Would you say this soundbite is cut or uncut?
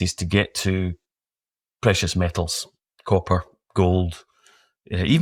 uncut